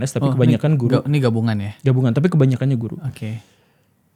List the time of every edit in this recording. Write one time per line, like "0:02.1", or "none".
none